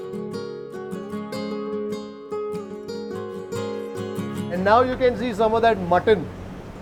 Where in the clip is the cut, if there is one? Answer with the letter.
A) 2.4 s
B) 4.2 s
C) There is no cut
C